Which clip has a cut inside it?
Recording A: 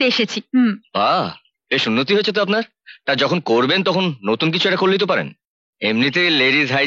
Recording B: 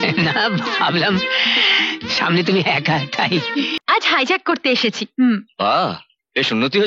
B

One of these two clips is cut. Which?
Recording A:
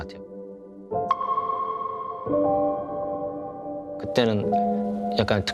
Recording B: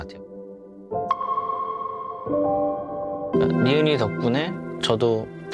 B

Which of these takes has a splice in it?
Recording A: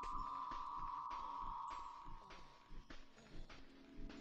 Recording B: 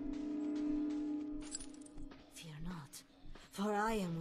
B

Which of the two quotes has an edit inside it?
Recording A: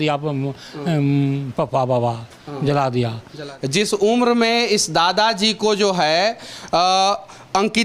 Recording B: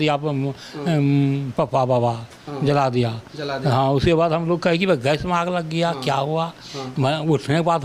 A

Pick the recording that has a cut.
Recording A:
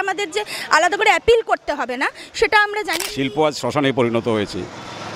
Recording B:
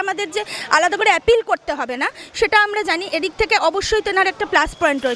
A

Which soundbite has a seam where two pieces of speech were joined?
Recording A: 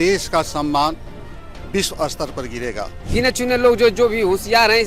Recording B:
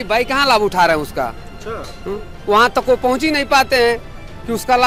A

